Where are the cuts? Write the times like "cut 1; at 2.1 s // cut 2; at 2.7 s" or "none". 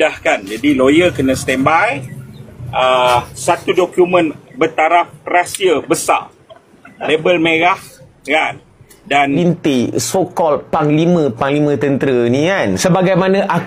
cut 1; at 9.4 s